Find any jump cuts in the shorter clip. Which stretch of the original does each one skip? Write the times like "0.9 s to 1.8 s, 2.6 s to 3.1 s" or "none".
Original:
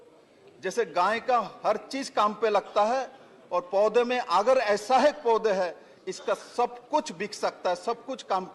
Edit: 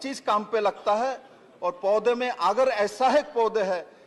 none